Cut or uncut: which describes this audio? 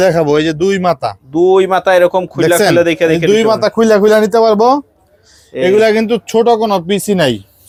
uncut